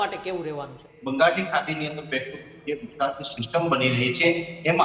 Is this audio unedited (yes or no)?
no